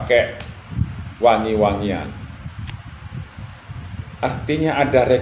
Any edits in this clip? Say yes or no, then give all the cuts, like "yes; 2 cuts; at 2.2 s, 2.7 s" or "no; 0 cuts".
yes; 1 cut; at 2.7 s